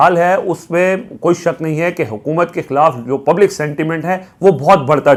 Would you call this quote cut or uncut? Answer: uncut